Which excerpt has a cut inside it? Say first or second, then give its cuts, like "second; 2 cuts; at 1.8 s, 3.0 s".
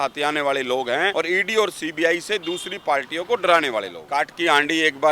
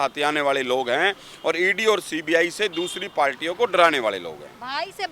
first; 2 cuts; at 1.1 s, 4.0 s